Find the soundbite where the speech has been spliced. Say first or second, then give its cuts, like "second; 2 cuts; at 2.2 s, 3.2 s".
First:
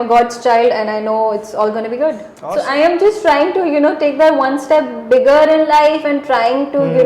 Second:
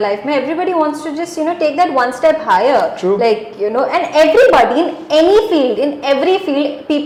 first; 1 cut; at 2.3 s